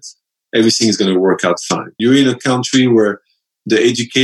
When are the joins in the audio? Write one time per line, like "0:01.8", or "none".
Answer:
0:01.9